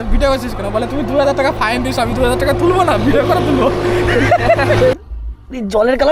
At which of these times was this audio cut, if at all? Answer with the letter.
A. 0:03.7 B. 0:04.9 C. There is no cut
B